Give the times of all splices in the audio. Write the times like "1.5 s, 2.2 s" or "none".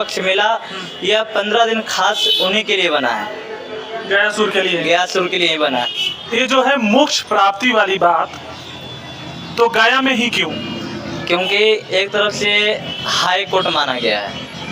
5.9 s